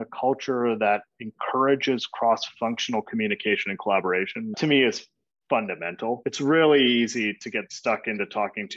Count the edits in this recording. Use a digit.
1